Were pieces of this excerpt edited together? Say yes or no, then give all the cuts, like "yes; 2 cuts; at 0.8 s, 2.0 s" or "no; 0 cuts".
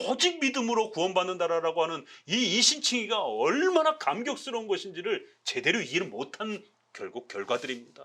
no; 0 cuts